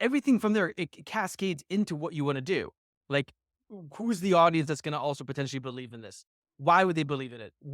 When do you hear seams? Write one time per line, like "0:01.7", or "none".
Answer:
none